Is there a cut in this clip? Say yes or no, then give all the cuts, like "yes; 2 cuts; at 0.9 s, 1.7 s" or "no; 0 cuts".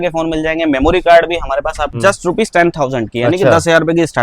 yes; 1 cut; at 1.9 s